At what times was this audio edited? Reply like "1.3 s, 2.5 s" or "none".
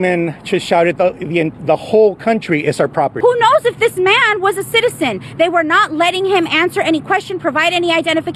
none